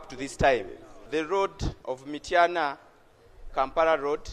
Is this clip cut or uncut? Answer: cut